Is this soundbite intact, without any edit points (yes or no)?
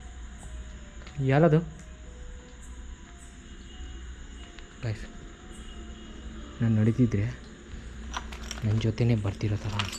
yes